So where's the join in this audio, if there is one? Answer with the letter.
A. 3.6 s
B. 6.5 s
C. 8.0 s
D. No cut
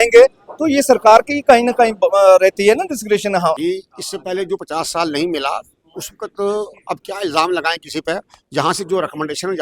A